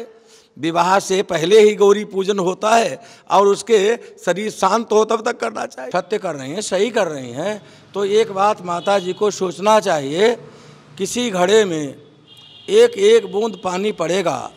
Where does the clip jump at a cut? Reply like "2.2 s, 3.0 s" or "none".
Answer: 5.8 s